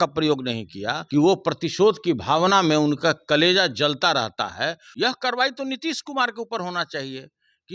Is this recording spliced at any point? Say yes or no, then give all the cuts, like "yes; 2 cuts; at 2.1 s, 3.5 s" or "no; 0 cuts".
yes; 2 cuts; at 0.9 s, 4.8 s